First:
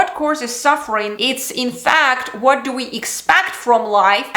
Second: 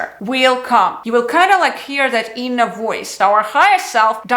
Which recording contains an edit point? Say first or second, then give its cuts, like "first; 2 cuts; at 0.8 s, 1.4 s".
second; 2 cuts; at 1.0 s, 3.1 s